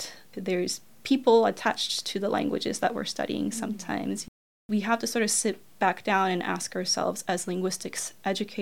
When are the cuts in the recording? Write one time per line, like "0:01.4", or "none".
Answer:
0:04.6